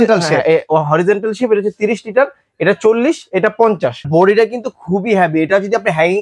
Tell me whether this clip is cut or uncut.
cut